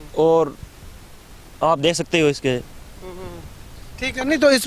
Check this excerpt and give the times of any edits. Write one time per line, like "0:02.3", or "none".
none

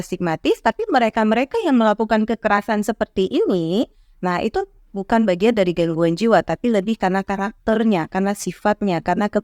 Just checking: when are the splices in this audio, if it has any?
none

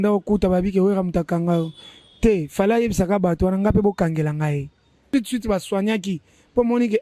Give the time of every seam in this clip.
0:04.9

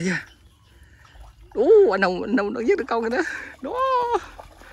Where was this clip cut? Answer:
none

